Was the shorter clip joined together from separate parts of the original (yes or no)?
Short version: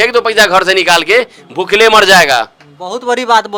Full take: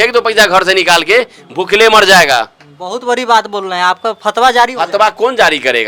no